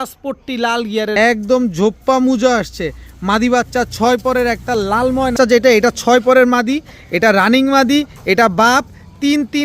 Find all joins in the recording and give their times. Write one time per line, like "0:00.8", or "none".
0:01.1
0:05.3